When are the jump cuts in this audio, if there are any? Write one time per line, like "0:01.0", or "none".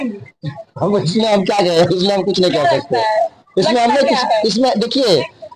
none

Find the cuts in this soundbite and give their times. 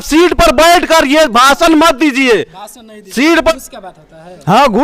0:03.5

